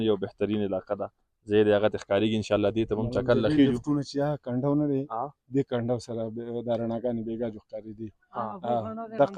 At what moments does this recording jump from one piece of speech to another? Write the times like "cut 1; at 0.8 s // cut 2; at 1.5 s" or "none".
none